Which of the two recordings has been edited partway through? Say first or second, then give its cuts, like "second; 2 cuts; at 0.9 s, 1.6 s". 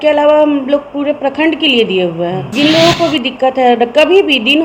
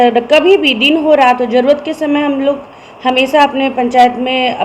first; 1 cut; at 2.4 s